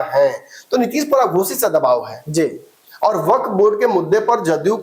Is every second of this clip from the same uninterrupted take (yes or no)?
yes